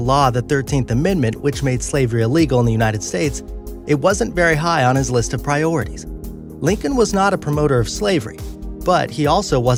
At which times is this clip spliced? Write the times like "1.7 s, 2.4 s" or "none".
none